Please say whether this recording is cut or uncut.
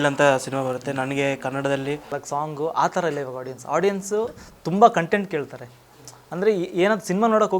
cut